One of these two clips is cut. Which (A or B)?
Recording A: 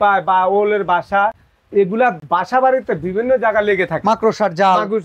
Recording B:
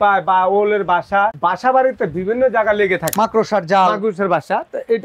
B